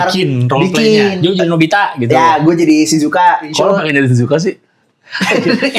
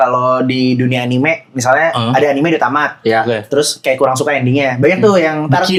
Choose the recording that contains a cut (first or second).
first